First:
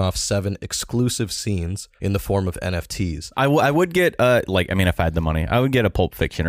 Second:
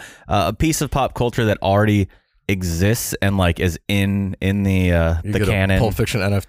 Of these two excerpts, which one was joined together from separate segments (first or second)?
first